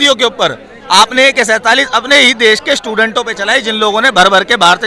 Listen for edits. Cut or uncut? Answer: uncut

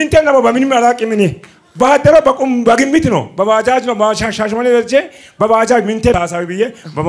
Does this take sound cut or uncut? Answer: cut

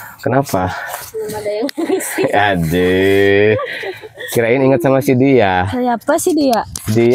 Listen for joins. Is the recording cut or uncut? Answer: uncut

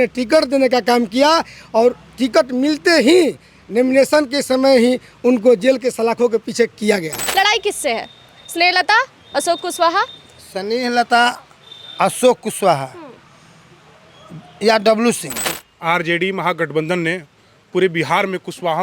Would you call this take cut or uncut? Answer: cut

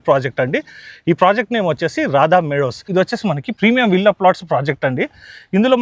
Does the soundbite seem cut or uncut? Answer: cut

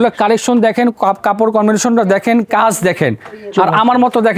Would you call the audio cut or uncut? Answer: uncut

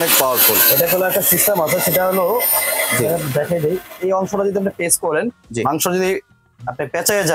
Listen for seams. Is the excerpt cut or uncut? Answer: uncut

